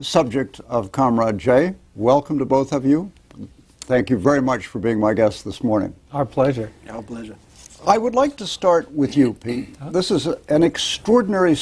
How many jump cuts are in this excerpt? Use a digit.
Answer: 0